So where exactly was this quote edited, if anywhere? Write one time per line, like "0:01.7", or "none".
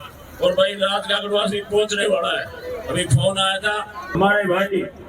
0:04.0

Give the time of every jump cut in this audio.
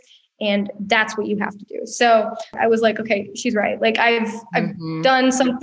0:02.5

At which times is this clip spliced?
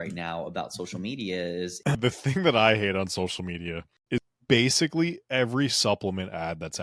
0:02.0
0:04.3

